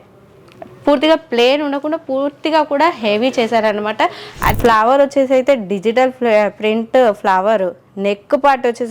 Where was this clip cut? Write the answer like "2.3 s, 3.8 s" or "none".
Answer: 4.6 s